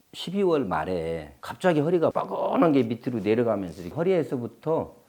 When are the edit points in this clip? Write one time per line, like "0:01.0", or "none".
0:02.1